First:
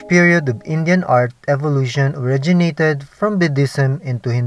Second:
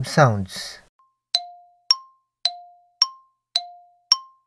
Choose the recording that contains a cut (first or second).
second